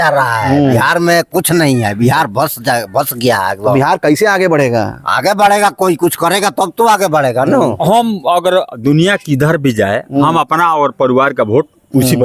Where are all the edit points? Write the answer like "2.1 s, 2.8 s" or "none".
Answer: 7.8 s